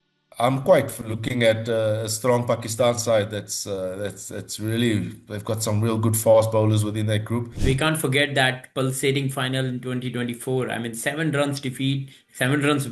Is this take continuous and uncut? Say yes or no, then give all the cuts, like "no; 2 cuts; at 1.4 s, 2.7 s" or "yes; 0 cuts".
no; 1 cut; at 7.6 s